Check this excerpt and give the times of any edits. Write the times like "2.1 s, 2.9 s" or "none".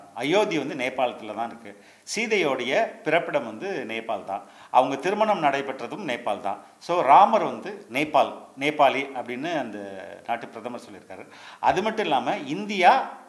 none

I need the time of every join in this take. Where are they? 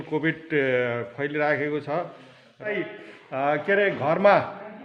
2.8 s

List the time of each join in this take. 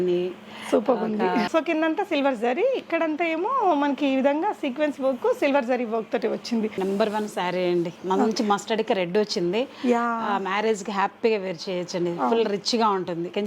1.5 s, 6.8 s

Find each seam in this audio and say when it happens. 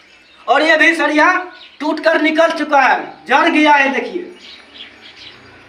none

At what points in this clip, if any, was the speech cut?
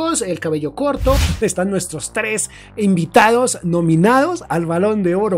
1.2 s

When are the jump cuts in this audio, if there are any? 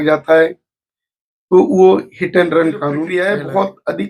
3.0 s

